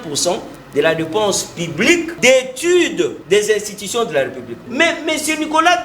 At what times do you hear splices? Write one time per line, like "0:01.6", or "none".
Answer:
0:02.1
0:03.2
0:04.6